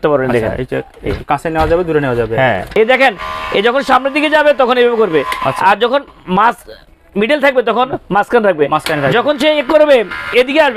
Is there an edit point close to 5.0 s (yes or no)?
no